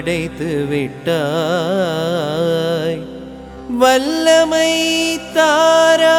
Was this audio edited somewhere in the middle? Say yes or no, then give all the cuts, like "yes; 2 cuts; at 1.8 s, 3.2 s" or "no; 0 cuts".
no; 0 cuts